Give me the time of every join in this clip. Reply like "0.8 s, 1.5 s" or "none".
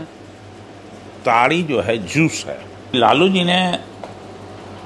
2.9 s